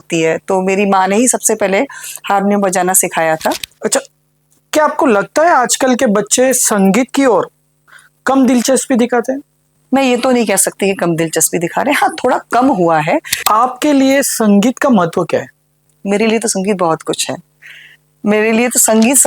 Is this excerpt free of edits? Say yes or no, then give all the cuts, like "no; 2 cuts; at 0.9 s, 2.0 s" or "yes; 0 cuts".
no; 2 cuts; at 3.7 s, 13.3 s